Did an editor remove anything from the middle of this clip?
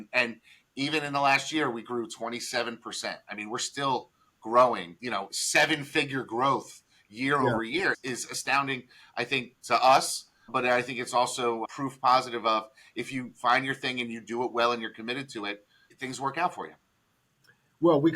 yes; 1 cut; at 4.9 s

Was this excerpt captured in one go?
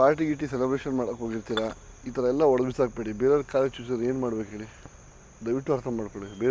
yes; 0 cuts

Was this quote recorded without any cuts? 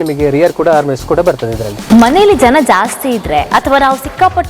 no; 1 cut; at 1.8 s

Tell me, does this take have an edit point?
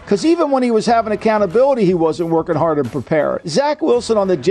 yes; 1 cut; at 3.4 s

